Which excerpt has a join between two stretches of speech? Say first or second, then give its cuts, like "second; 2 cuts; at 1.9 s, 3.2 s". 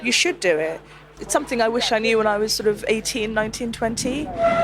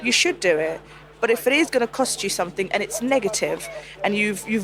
first; 1 cut; at 1.1 s